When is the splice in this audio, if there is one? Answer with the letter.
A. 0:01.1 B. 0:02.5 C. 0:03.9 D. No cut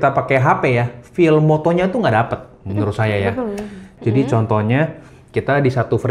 C